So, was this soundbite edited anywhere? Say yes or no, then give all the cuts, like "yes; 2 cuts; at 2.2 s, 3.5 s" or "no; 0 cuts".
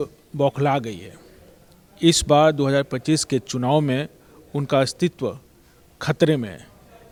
no; 0 cuts